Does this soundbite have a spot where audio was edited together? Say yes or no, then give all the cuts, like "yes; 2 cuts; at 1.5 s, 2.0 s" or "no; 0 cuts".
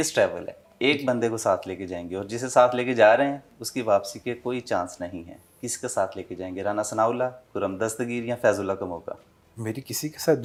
no; 0 cuts